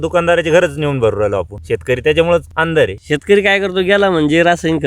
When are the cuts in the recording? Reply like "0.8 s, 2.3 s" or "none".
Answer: 1.6 s, 2.6 s

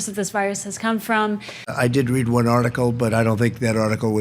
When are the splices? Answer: 1.6 s

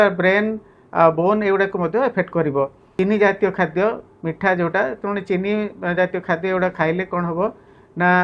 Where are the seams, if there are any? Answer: 3.0 s

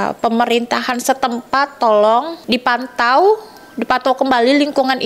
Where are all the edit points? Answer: 2.4 s

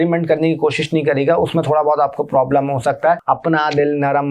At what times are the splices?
3.2 s

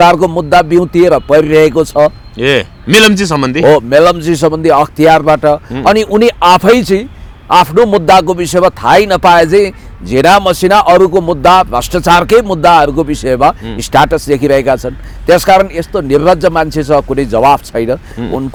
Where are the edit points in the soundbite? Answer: none

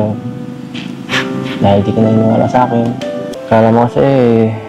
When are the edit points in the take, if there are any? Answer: 3.3 s

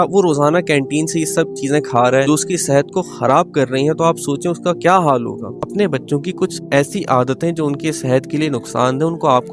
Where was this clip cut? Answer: 2.2 s, 5.6 s, 6.6 s

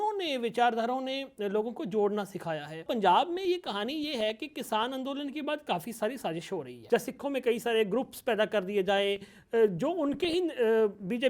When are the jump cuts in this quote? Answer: 2.8 s, 6.7 s

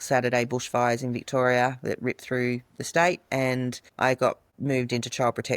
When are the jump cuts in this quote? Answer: 3.8 s, 4.5 s

